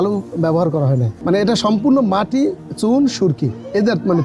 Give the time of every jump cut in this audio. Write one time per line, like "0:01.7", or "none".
0:01.1